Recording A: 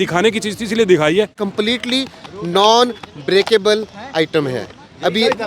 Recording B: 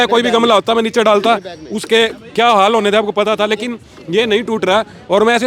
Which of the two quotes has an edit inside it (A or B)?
A